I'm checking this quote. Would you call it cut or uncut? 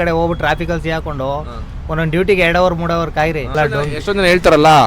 cut